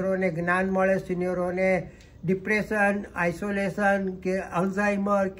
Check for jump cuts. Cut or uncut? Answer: uncut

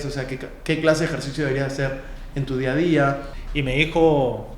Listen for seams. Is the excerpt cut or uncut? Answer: cut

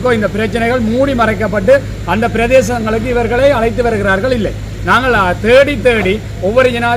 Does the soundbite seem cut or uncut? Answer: uncut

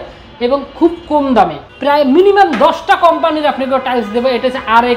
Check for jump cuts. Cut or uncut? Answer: cut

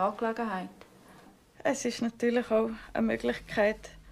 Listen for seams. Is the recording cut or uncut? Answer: cut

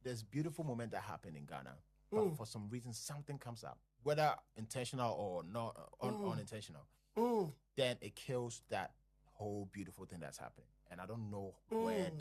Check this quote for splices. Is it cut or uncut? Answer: uncut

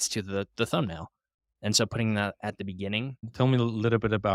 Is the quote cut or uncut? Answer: cut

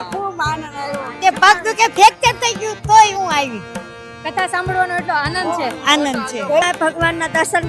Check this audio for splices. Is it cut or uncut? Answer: cut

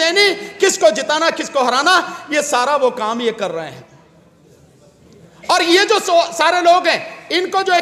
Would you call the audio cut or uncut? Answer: uncut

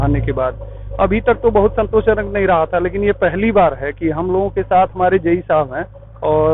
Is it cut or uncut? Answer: uncut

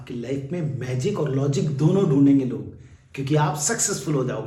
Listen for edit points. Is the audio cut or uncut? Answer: uncut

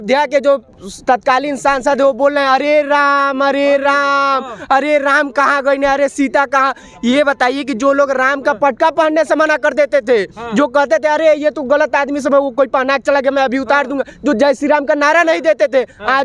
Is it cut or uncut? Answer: uncut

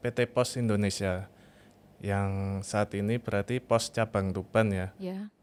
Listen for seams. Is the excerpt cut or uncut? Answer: uncut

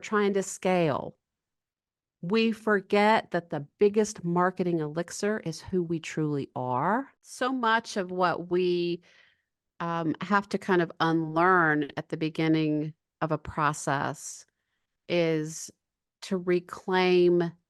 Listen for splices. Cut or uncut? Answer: cut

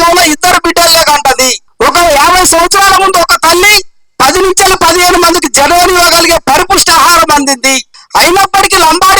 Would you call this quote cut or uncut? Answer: cut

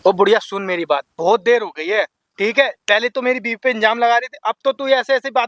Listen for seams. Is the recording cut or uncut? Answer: uncut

